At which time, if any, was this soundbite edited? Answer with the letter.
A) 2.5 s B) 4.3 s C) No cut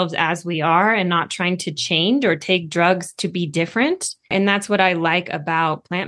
B